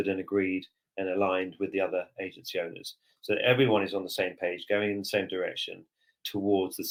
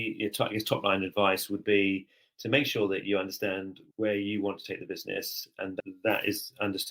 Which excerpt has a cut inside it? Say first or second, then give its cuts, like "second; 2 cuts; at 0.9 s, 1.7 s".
second; 2 cuts; at 3.8 s, 5.8 s